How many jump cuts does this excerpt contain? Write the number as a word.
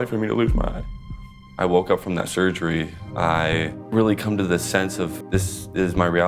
four